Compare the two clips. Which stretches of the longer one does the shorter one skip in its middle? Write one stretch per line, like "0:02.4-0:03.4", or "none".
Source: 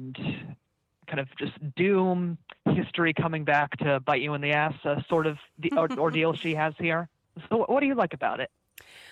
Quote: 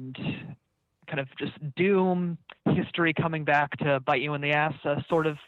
none